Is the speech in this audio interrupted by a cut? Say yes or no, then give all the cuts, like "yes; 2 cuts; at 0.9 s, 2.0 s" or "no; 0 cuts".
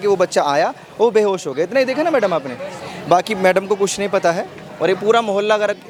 no; 0 cuts